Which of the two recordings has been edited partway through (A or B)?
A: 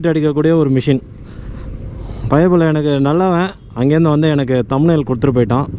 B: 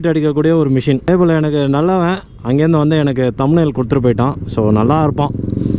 B